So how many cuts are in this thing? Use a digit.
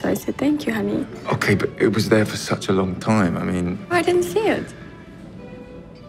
1